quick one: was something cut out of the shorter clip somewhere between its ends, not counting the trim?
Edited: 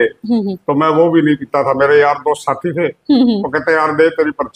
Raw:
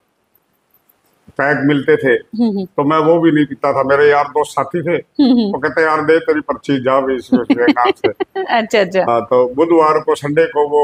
no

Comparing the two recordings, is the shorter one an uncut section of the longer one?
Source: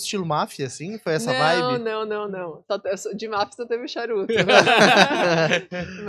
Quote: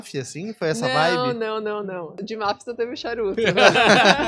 no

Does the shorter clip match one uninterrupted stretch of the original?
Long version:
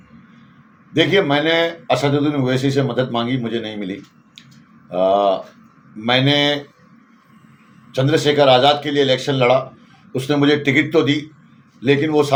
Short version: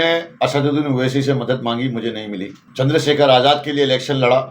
no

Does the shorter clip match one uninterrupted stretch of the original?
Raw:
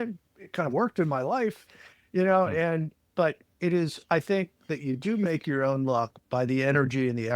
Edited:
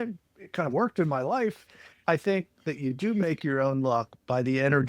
no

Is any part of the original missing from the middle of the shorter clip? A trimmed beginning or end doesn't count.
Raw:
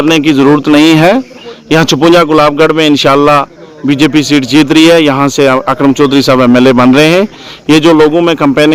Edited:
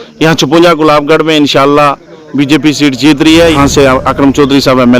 yes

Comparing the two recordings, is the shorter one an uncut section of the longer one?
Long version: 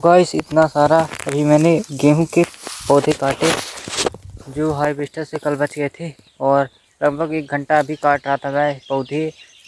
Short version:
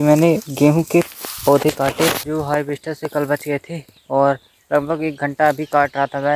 no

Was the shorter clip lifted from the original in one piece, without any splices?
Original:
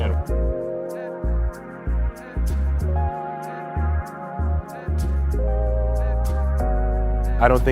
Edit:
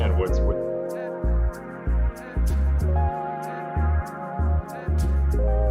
yes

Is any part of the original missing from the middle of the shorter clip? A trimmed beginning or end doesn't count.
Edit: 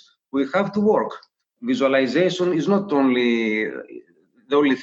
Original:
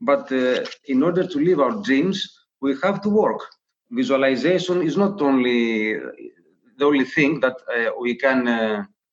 no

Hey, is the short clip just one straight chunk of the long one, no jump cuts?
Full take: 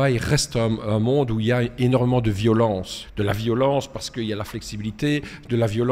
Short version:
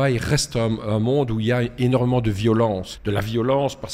no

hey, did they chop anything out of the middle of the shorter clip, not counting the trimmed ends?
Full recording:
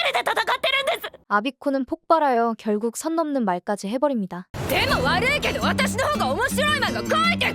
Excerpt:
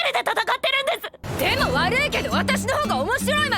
yes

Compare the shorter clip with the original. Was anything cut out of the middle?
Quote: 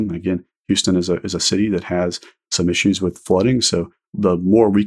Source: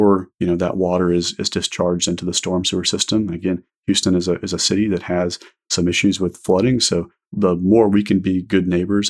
no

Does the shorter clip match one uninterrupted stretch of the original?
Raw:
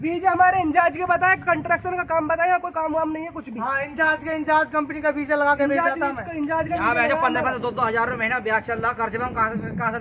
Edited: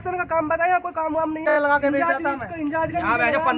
no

